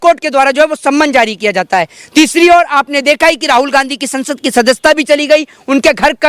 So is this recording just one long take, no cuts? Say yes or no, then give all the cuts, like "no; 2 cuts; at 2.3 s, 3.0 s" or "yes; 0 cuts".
yes; 0 cuts